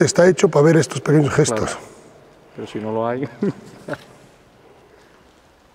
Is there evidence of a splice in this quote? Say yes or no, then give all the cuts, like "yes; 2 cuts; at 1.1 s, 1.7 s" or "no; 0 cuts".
no; 0 cuts